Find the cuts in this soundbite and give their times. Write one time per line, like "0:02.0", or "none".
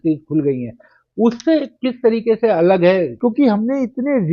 0:03.1